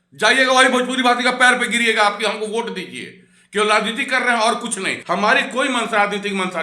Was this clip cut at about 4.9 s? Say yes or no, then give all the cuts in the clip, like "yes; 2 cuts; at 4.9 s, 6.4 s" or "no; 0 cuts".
yes; 1 cut; at 4.9 s